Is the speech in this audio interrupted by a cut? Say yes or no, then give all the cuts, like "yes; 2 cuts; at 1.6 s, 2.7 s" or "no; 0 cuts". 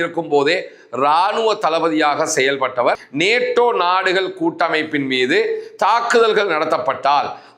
yes; 1 cut; at 3.0 s